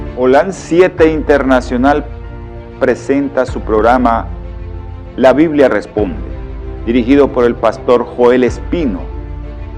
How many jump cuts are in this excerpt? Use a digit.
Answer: 1